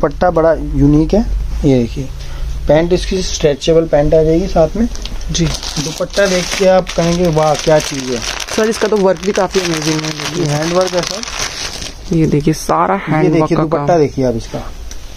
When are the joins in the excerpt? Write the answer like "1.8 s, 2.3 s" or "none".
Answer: none